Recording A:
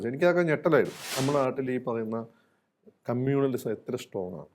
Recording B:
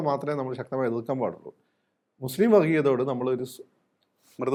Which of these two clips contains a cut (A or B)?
A